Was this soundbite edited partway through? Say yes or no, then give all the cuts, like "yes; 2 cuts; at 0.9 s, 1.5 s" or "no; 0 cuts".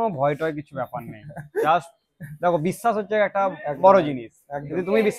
no; 0 cuts